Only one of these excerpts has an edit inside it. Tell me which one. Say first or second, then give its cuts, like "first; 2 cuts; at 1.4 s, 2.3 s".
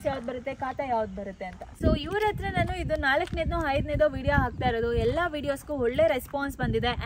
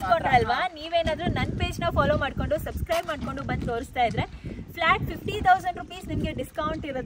first; 1 cut; at 1.6 s